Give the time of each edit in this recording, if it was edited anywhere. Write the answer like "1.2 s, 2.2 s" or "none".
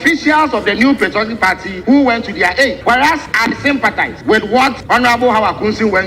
1.7 s, 3.0 s, 4.1 s, 4.8 s

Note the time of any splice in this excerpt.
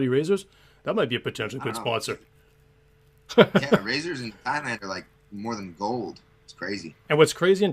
1.2 s

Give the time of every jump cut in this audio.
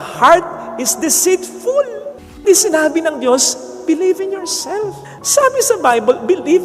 2.4 s

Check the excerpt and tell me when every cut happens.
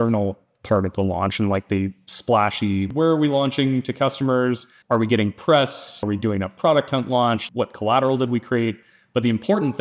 2.9 s, 4.7 s, 6.0 s, 7.4 s

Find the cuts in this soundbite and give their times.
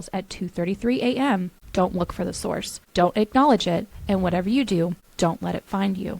1.6 s, 2.7 s, 5.0 s

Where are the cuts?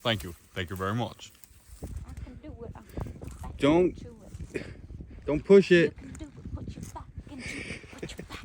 1.7 s

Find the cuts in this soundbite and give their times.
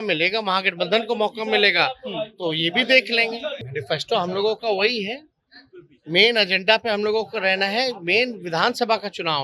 3.6 s

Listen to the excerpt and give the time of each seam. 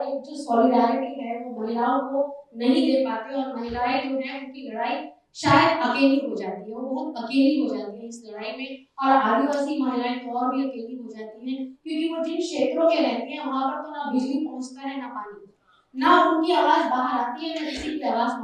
none

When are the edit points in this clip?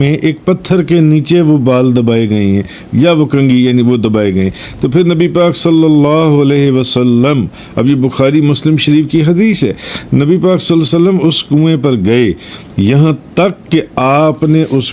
none

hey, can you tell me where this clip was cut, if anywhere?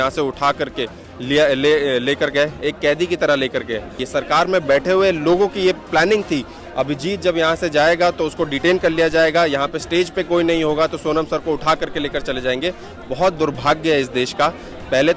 4.0 s

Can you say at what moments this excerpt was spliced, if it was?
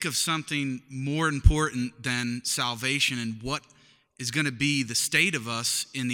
none

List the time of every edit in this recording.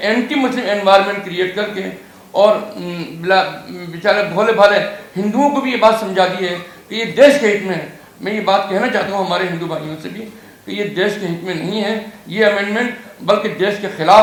none

